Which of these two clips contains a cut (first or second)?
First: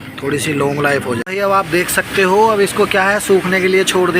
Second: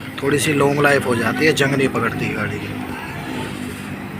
first